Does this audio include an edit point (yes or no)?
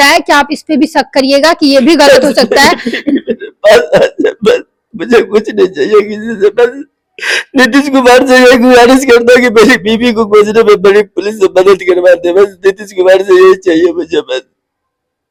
no